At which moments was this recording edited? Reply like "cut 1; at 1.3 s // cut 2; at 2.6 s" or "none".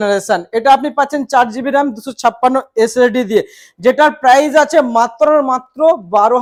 none